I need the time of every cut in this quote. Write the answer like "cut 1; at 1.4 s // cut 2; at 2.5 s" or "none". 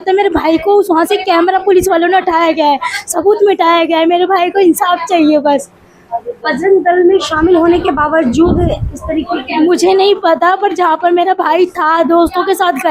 none